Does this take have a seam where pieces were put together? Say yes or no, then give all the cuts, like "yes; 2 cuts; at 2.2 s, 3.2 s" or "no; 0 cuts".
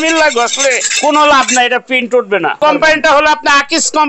yes; 2 cuts; at 0.9 s, 2.6 s